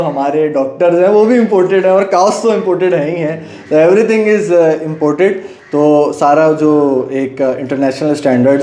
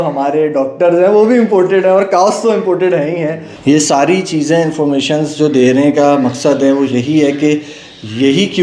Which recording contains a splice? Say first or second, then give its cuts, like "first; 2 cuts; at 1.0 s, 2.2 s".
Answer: second; 1 cut; at 3.5 s